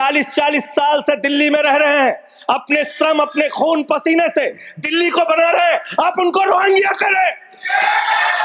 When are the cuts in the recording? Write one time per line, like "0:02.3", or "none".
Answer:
none